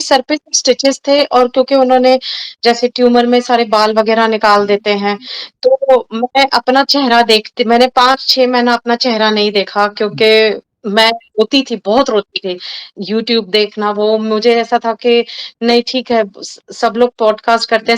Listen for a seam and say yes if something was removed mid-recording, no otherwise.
yes